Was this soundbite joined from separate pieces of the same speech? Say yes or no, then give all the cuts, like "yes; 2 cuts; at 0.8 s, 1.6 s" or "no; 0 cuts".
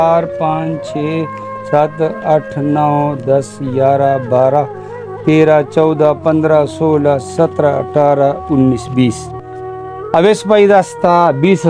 no; 0 cuts